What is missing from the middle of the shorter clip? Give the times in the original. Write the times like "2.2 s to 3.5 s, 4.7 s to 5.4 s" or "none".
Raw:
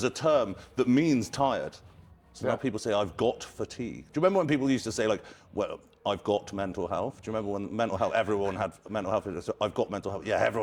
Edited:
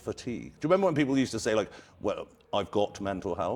none